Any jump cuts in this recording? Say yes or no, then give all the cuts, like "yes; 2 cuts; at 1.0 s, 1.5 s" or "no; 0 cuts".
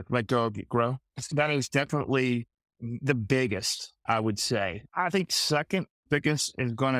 yes; 2 cuts; at 1.3 s, 6.0 s